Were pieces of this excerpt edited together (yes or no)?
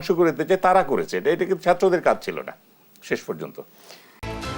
no